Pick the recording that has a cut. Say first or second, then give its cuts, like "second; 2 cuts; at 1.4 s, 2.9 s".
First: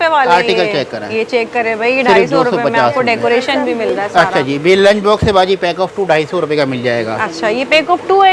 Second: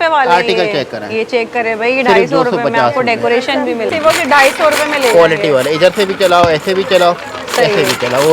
second; 1 cut; at 3.9 s